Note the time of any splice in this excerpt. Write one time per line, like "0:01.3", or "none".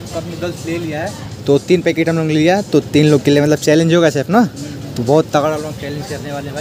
none